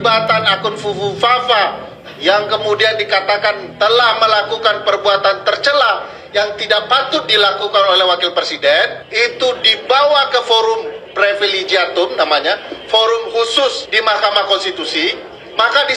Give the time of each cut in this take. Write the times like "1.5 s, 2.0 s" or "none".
none